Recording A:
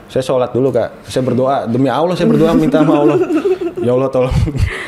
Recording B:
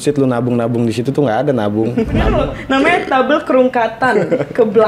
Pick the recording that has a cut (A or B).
B